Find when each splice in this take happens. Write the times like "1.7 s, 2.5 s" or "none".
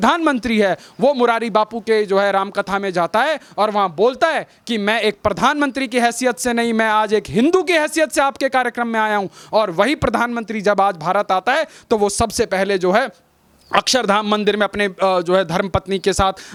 none